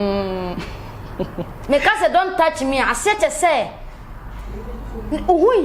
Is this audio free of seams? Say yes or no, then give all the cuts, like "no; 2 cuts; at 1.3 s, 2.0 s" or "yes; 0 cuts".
yes; 0 cuts